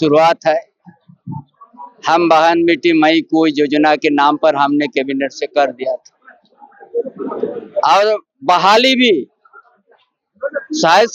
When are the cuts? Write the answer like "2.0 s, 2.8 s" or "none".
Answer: none